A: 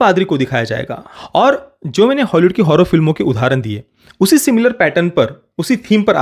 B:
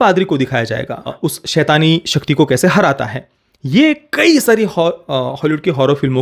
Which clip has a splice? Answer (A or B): A